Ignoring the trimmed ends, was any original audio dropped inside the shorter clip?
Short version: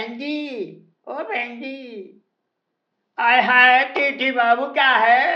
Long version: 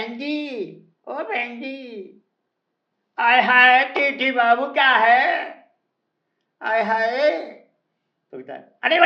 no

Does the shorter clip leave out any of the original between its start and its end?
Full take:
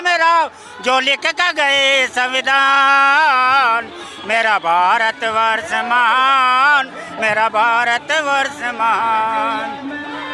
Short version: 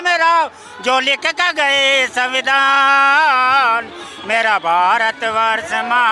no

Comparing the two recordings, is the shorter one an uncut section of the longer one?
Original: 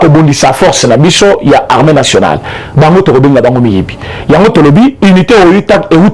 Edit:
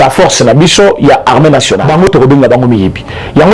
no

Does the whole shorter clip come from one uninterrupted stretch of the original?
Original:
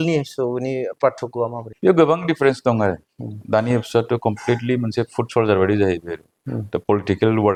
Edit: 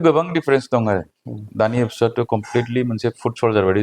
yes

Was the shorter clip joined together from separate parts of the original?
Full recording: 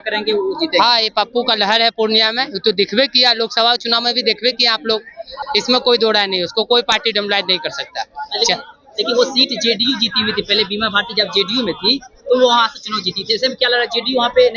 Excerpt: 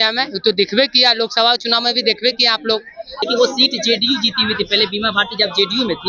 yes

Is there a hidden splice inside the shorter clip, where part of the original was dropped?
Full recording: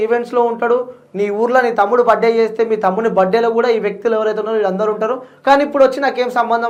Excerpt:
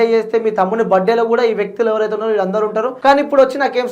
yes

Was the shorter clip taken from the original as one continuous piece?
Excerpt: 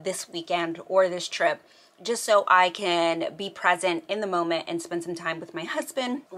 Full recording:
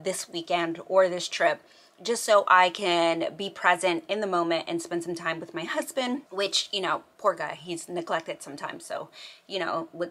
yes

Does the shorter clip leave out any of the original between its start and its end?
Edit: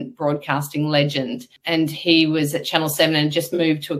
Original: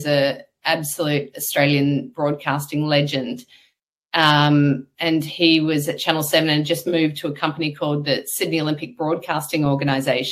yes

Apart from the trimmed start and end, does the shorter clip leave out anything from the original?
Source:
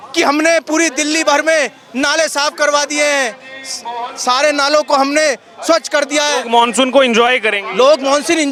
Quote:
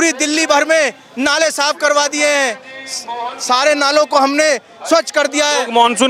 no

